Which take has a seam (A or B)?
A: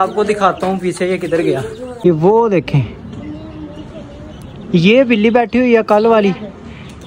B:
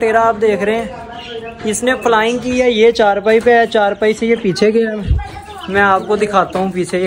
A